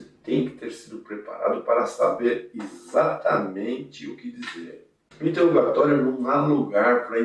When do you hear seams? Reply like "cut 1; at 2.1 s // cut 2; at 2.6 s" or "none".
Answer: none